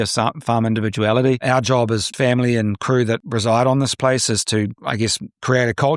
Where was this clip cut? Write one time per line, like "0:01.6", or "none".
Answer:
0:02.1
0:03.2